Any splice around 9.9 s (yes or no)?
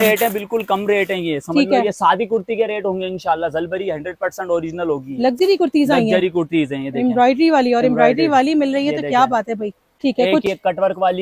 yes